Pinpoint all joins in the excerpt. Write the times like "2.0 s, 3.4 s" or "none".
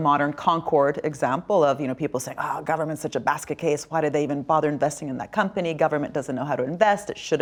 none